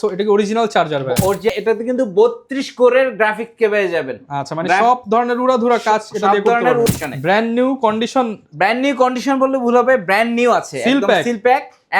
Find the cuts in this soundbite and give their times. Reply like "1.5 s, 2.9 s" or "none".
1.5 s, 6.9 s